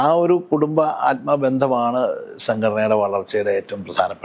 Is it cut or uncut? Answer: uncut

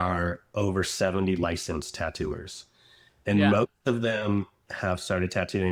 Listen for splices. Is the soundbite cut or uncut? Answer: uncut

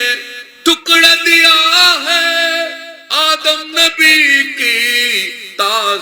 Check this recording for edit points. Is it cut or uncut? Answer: uncut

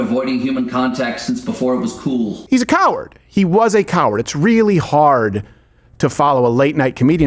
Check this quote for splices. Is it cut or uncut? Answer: cut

